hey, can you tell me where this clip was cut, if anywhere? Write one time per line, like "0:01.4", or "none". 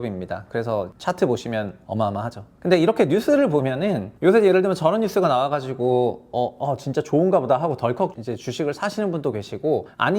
0:00.9
0:04.1